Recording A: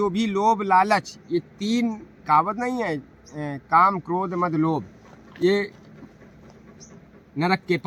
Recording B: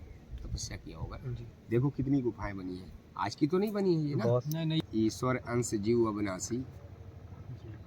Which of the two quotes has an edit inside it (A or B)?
B